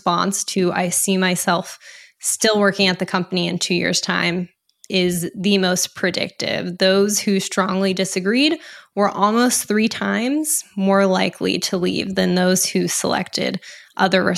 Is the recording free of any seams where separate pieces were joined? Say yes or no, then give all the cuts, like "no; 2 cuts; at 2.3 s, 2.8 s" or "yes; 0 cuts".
yes; 0 cuts